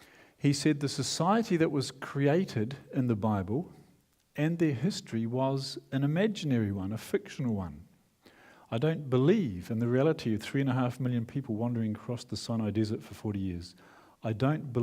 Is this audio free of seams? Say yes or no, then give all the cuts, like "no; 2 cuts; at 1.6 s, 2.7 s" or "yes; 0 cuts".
no; 1 cut; at 5.3 s